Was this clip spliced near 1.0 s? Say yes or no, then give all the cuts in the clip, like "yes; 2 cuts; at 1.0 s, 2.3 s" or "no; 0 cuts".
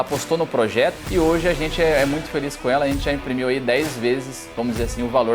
yes; 1 cut; at 1.0 s